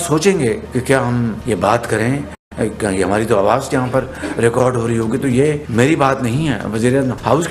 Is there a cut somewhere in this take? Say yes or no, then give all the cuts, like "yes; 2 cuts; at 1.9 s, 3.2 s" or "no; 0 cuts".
no; 0 cuts